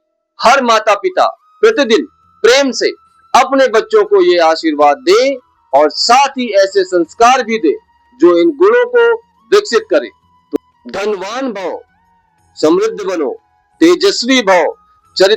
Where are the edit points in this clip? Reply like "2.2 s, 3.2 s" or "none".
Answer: 10.5 s